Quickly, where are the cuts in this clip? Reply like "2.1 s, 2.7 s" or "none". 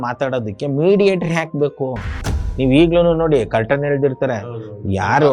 2.4 s

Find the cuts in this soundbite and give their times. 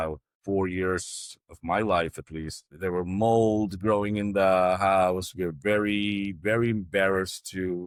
none

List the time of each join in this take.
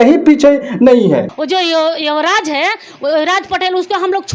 1.4 s

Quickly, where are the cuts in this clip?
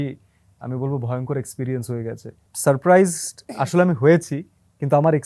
2.5 s

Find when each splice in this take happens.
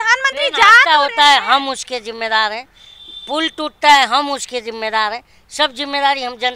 none

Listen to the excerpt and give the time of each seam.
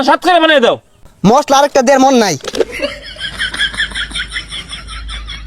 1.0 s, 2.9 s

